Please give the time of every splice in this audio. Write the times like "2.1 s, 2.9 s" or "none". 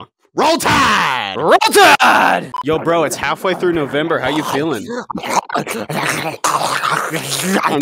2.5 s

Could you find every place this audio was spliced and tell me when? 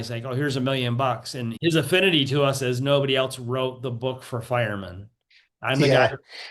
1.5 s

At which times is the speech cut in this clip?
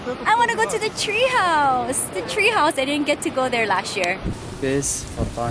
4.4 s

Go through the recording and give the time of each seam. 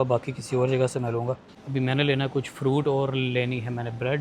1.5 s

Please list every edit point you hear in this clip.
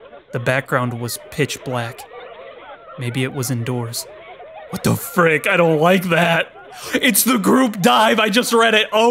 none

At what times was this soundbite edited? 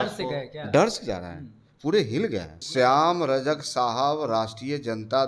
2.6 s

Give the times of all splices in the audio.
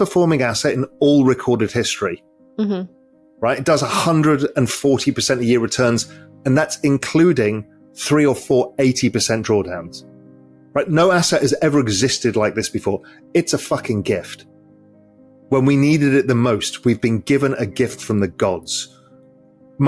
none

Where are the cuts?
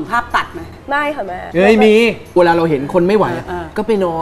0.8 s, 2.3 s

